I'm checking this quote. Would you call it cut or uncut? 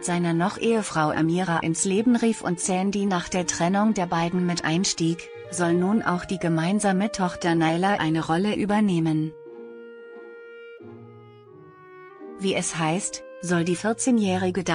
uncut